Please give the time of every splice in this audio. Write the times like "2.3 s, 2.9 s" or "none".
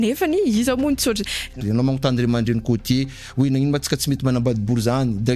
1.6 s